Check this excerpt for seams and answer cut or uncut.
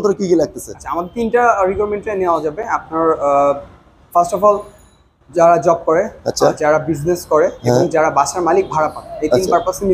uncut